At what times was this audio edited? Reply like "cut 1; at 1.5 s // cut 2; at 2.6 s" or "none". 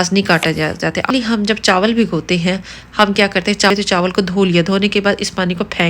cut 1; at 1.1 s // cut 2; at 3.7 s